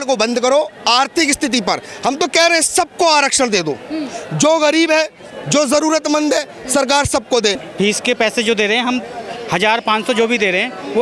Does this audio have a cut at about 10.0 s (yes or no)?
no